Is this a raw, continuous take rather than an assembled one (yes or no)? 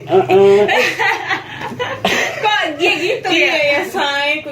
no